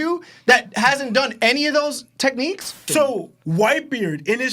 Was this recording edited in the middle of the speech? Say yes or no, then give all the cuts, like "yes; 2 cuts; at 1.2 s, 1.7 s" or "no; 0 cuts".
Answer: yes; 1 cut; at 2.8 s